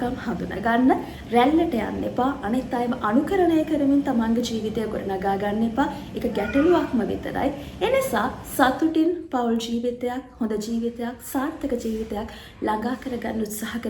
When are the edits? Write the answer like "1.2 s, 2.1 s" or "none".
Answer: none